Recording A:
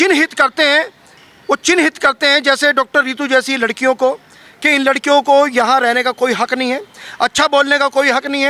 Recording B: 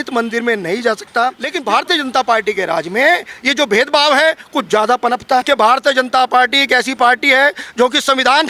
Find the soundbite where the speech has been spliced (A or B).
B